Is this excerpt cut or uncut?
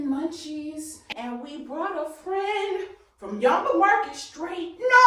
cut